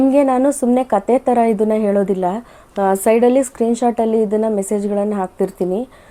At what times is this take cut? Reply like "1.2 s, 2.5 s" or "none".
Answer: none